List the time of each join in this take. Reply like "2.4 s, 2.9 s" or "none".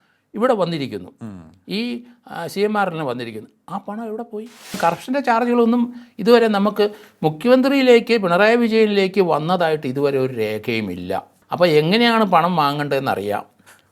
4.8 s, 11.4 s